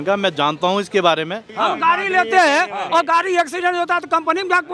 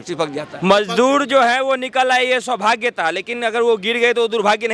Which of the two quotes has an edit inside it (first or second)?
first